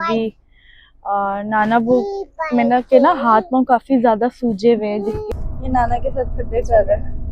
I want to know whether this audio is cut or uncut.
cut